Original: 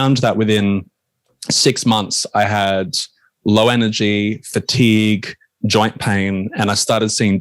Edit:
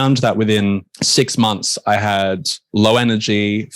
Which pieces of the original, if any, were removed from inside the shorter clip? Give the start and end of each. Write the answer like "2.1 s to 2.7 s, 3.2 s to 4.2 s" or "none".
0.9 s to 1.4 s, 3.0 s to 3.3 s